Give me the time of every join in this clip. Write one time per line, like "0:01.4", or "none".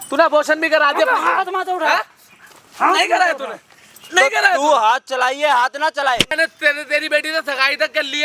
none